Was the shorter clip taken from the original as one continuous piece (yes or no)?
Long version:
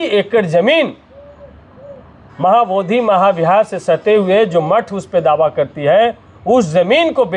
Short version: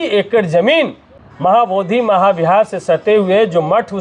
no